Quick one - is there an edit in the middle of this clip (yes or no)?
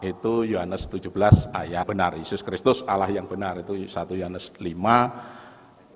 yes